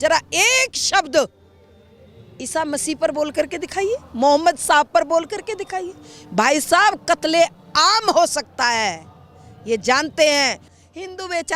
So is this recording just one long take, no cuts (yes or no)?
yes